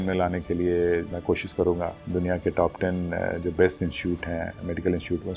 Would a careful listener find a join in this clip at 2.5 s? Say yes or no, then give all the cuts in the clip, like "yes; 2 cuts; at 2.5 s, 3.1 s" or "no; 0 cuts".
no; 0 cuts